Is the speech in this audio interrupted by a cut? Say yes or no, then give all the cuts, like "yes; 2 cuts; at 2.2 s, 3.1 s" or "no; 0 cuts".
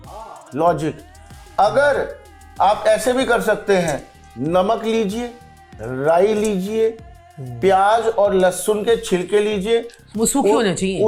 no; 0 cuts